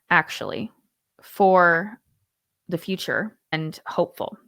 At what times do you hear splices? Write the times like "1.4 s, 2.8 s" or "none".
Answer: 3.6 s

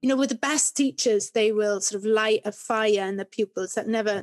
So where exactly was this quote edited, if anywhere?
none

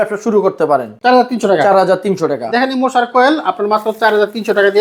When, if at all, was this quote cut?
none

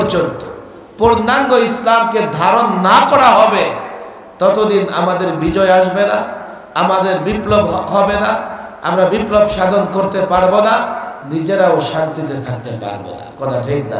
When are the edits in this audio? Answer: none

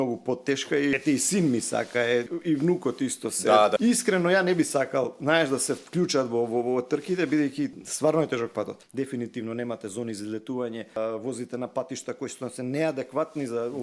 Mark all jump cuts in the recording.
1.0 s, 2.3 s, 3.8 s, 7.8 s, 8.8 s, 11.0 s

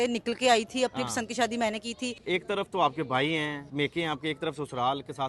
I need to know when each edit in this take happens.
2.2 s, 3.6 s

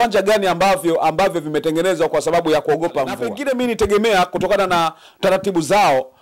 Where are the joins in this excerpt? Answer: 3.3 s

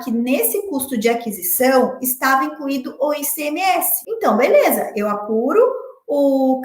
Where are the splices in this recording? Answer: 4.0 s

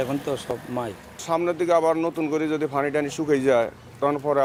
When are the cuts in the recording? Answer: none

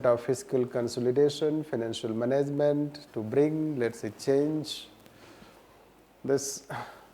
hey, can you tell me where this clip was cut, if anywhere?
none

